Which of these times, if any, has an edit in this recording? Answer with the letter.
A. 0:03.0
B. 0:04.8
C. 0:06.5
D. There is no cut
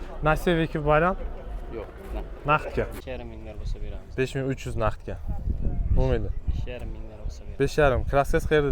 A